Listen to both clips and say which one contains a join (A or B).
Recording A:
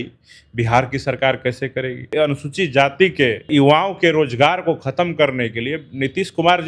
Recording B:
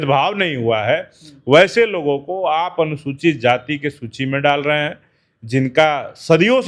A